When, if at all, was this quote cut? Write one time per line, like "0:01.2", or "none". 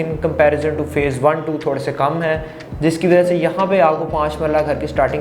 none